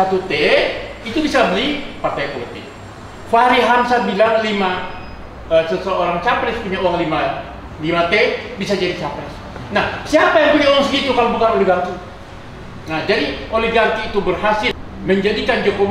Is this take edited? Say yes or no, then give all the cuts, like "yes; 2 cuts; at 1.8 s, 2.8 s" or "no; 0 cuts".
yes; 1 cut; at 14.7 s